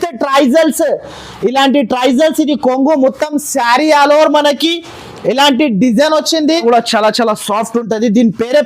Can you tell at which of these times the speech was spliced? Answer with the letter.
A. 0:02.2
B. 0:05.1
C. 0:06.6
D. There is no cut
C